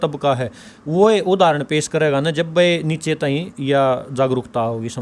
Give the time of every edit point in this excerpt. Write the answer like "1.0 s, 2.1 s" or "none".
none